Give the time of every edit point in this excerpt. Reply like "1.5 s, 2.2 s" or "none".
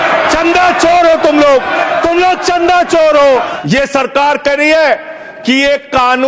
3.5 s